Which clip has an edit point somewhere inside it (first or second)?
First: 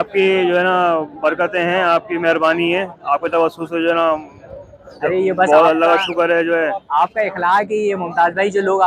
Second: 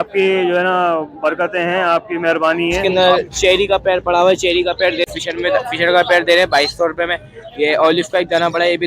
second